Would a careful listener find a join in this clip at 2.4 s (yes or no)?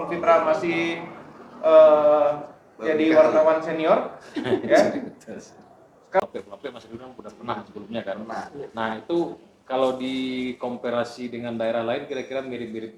no